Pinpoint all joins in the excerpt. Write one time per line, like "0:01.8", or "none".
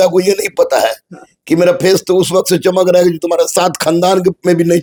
none